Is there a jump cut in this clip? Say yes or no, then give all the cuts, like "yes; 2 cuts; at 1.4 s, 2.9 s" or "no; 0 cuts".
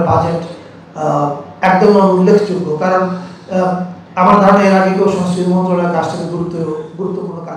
no; 0 cuts